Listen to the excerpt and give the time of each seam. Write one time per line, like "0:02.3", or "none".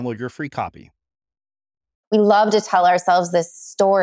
0:02.0